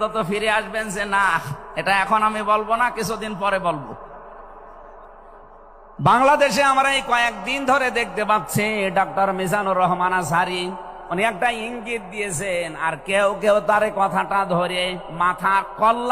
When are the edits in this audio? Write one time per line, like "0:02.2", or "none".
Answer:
0:05.9